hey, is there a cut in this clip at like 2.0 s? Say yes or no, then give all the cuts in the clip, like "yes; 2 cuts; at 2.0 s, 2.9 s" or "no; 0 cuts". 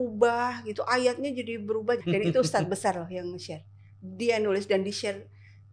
yes; 1 cut; at 2.0 s